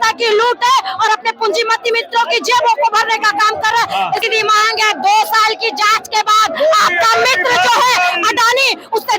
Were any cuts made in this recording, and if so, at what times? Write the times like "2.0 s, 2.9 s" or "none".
4.2 s